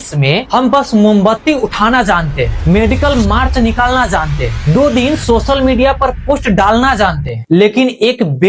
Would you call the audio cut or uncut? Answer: uncut